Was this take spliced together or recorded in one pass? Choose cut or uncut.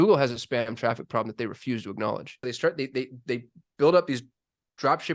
cut